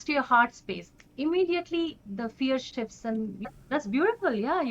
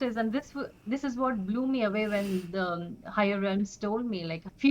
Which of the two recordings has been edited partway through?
first; 1 cut; at 3.4 s

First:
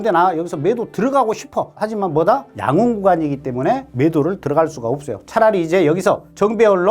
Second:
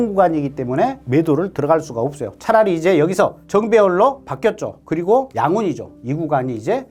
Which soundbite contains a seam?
first; 1 cut; at 1.7 s

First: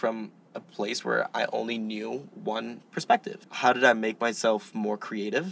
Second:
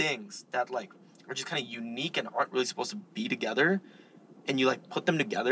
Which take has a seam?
first; 1 cut; at 3.3 s

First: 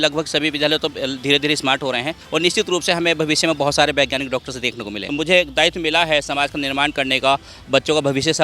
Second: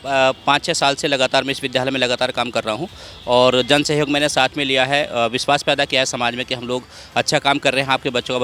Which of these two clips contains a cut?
first; 2 cuts; at 2.2 s, 5.1 s

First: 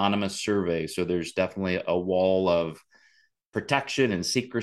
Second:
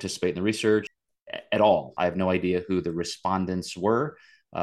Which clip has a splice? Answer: second; 2 cuts; at 1.0 s, 1.9 s

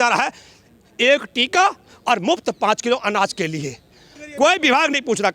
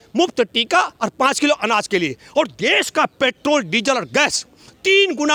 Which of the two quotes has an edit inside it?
first; 1 cut; at 4.1 s

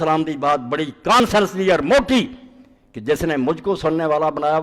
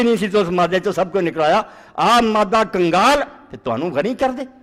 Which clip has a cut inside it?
first; 1 cut; at 1.2 s

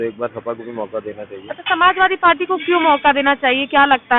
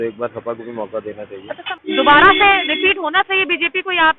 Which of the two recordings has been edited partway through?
second; 1 cut; at 1.6 s

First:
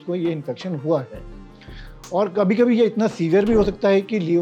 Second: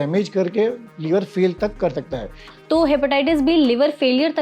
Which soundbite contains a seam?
second; 1 cut; at 2.4 s

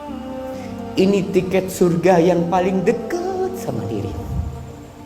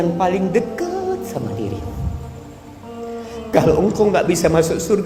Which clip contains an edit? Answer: first; 1 cut; at 0.9 s

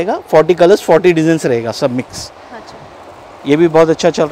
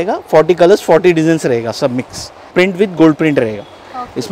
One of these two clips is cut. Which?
second; 1 cut; at 2.5 s

